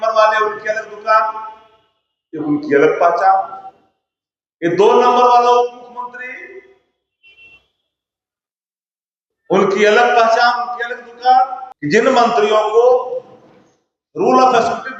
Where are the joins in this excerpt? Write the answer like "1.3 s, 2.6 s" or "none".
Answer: 11.7 s